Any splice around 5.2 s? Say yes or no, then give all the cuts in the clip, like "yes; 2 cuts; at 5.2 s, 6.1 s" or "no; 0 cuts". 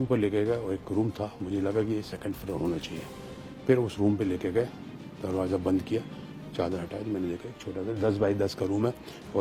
no; 0 cuts